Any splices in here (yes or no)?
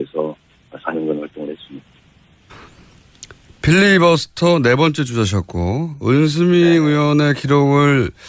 no